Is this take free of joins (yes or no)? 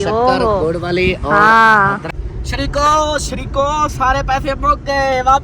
no